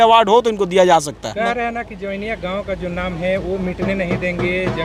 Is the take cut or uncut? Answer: uncut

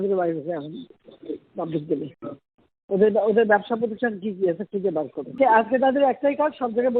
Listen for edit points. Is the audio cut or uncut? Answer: cut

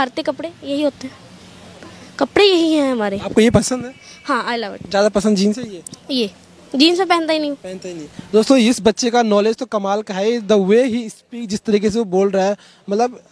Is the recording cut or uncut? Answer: uncut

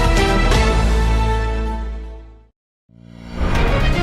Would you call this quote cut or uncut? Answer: cut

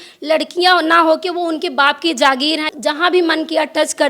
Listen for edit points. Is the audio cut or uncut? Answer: cut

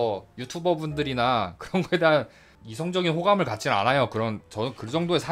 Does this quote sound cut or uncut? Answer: cut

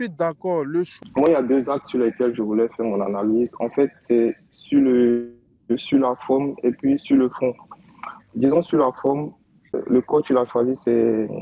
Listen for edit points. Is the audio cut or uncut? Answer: cut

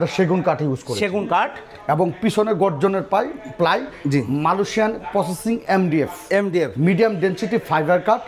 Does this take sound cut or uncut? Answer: uncut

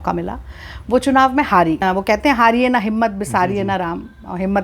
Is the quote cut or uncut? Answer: cut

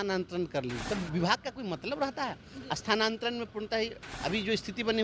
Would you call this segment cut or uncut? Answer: cut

